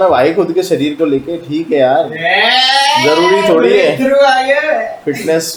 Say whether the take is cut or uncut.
uncut